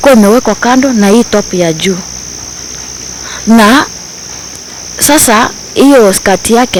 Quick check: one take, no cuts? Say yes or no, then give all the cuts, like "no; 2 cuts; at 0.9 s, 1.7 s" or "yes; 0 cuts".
yes; 0 cuts